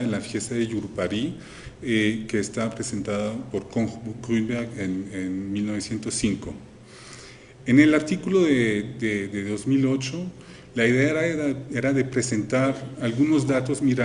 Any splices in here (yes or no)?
yes